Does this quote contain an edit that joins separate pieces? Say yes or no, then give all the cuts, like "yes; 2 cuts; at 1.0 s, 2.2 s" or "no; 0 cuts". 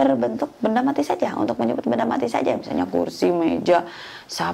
no; 0 cuts